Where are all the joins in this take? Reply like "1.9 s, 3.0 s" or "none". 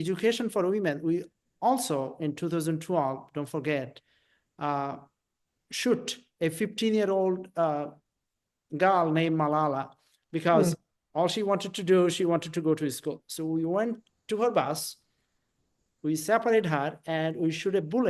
none